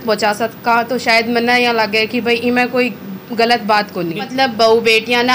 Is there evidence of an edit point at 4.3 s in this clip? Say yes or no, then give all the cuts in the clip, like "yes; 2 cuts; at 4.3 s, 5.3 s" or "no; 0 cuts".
yes; 1 cut; at 4.3 s